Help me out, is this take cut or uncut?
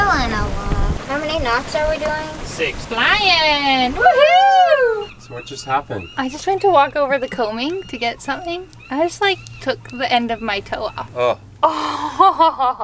cut